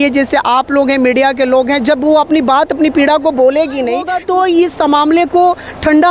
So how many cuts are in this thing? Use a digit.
1